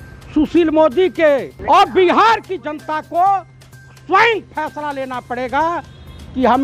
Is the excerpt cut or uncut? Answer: cut